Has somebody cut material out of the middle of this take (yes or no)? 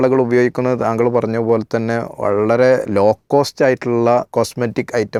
no